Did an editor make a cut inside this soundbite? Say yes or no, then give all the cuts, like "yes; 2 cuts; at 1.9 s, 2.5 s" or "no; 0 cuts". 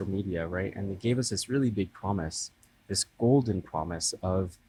no; 0 cuts